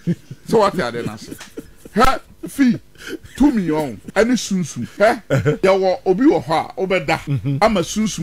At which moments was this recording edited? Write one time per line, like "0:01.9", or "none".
0:04.0
0:05.2
0:07.3